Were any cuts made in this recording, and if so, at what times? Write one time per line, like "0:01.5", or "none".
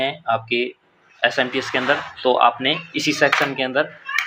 none